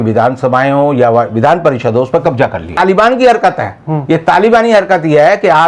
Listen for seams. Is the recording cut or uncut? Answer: cut